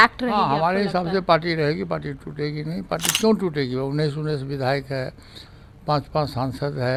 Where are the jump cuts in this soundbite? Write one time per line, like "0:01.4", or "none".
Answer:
none